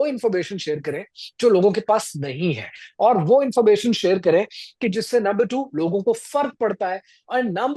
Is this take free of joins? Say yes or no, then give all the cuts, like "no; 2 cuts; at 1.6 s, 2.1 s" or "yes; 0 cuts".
yes; 0 cuts